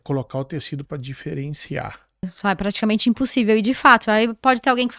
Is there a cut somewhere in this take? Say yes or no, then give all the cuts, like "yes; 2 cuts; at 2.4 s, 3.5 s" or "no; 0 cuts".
yes; 1 cut; at 2.3 s